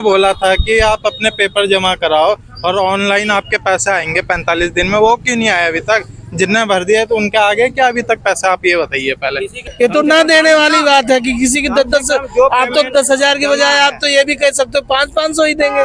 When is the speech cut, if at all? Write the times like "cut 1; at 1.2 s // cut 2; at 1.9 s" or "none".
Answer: cut 1; at 9.6 s